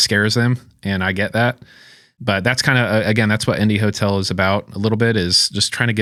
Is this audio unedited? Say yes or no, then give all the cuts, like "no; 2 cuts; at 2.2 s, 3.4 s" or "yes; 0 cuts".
yes; 0 cuts